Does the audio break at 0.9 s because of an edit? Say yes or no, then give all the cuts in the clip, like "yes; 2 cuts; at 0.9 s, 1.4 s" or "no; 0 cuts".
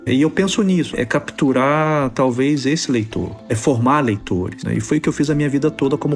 yes; 1 cut; at 0.9 s